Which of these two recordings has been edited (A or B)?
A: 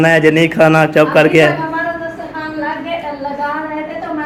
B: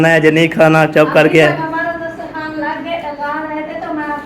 B